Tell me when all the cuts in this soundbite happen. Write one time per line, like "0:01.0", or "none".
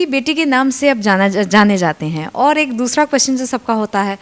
none